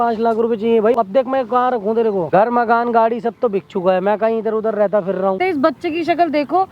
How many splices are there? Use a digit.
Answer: 3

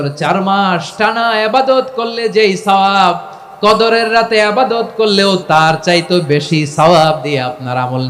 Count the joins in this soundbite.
1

